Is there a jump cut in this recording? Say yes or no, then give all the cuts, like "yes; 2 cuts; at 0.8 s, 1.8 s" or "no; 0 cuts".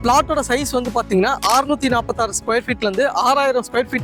no; 0 cuts